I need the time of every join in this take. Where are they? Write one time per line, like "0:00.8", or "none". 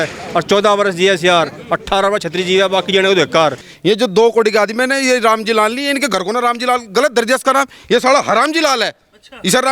0:03.7